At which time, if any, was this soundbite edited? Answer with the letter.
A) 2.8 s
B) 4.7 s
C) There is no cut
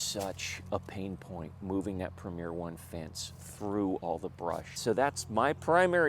B